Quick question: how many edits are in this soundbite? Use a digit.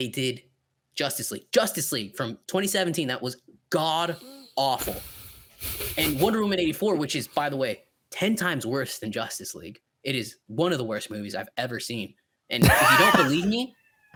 0